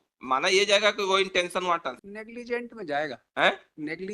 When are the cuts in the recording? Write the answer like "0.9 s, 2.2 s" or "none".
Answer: 2.1 s

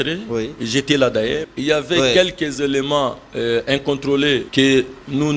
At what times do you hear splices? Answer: 1.4 s, 4.5 s

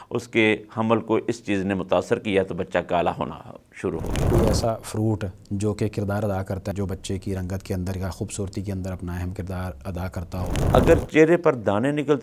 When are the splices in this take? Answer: 4.3 s, 10.6 s

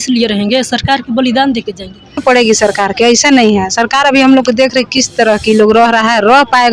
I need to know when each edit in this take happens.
2.1 s

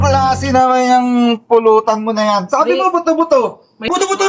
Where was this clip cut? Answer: none

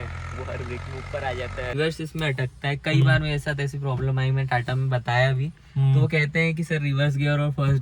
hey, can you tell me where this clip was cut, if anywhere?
1.8 s

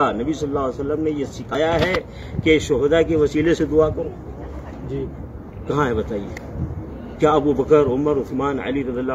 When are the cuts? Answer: 1.5 s

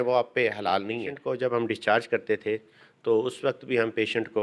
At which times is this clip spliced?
1.2 s

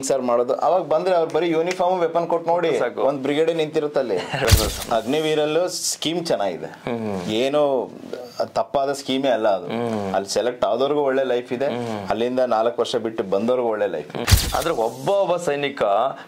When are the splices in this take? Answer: 4.4 s, 14.2 s

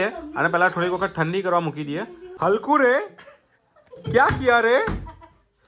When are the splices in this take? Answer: 2.3 s

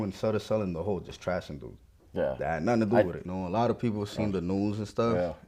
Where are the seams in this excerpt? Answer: 3.2 s

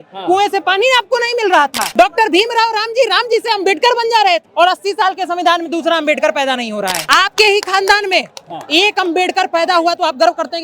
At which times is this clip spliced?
1.8 s, 4.5 s, 7.0 s

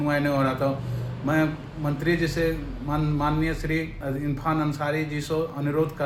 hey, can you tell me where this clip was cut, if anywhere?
none

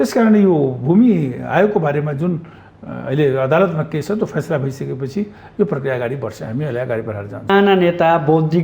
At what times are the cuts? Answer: 7.5 s

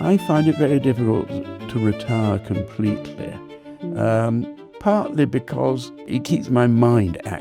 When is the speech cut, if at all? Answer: 6.1 s

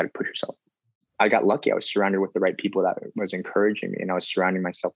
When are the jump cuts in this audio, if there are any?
1.0 s

